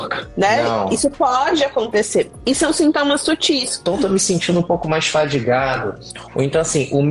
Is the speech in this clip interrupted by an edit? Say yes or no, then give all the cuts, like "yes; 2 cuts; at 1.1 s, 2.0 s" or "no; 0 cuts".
yes; 1 cut; at 3.8 s